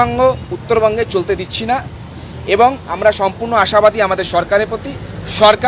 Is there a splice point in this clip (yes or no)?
no